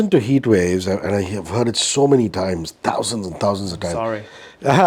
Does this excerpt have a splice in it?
no; 0 cuts

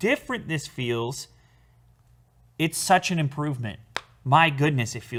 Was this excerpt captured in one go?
yes; 0 cuts

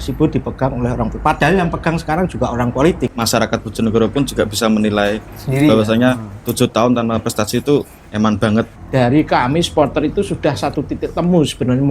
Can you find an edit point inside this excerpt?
yes; 3 cuts; at 3.1 s, 8.0 s, 8.8 s

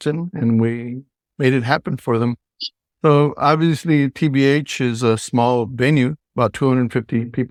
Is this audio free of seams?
yes; 0 cuts

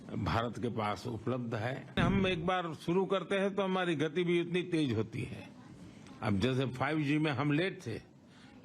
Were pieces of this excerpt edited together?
yes; 1 cut; at 2.0 s

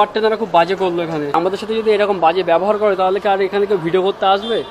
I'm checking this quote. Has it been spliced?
yes; 1 cut; at 1.3 s

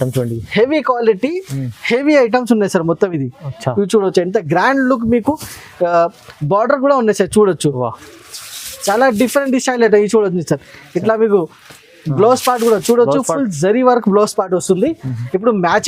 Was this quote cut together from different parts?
no; 0 cuts

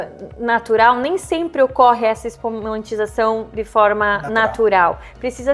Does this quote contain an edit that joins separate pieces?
no; 0 cuts

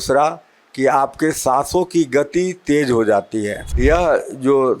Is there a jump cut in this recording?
yes; 1 cut; at 3.6 s

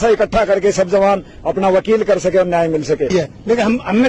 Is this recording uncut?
no; 1 cut; at 3.1 s

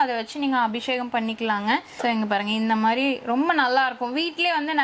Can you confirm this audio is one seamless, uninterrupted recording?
yes; 0 cuts

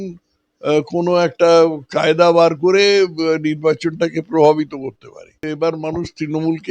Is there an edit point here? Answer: yes; 1 cut; at 5.5 s

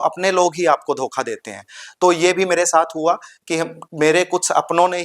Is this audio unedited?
yes; 0 cuts

